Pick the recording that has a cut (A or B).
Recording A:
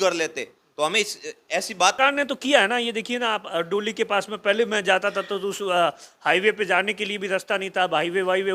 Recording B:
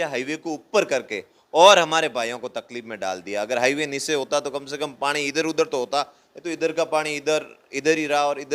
A